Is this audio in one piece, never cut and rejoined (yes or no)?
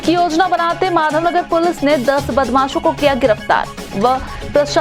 yes